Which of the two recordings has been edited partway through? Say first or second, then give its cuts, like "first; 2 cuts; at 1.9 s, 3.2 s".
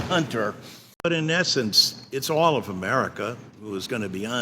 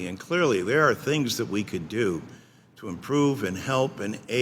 first; 1 cut; at 1.0 s